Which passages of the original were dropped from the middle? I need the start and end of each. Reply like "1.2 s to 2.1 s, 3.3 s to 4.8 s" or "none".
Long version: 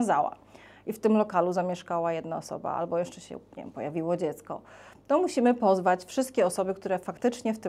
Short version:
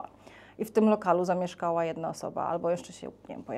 none